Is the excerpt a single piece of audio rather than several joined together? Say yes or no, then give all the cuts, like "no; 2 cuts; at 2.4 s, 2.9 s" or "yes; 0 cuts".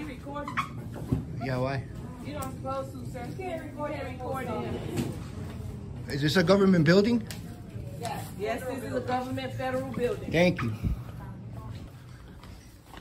yes; 0 cuts